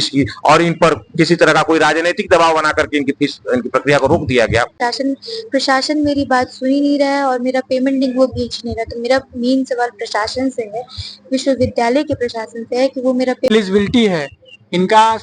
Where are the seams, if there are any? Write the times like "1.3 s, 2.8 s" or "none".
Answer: 4.8 s, 13.5 s